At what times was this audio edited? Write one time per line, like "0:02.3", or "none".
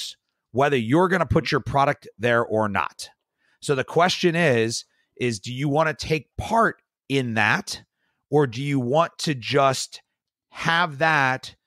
none